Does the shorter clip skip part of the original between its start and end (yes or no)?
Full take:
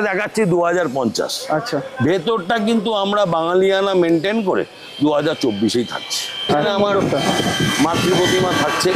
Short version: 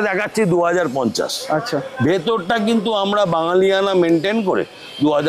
no